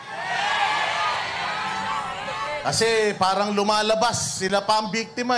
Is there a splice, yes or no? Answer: yes